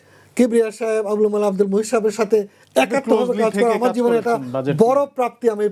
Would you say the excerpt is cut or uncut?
uncut